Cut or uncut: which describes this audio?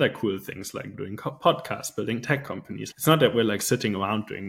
uncut